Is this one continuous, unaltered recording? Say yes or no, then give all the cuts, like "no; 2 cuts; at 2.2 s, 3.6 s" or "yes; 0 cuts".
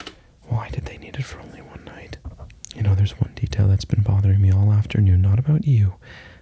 no; 1 cut; at 2.5 s